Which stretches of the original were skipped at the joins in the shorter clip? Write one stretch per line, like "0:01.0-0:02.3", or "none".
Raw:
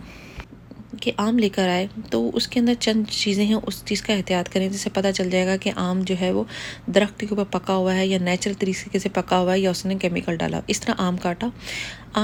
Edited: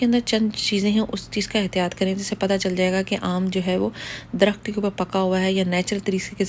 none